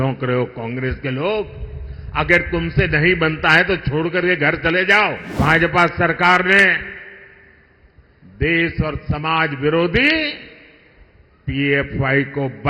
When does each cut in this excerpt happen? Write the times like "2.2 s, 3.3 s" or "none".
5.3 s